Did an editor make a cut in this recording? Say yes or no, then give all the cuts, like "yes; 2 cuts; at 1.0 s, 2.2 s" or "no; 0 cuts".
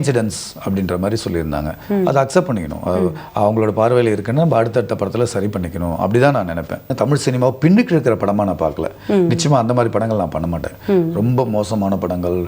yes; 1 cut; at 6.9 s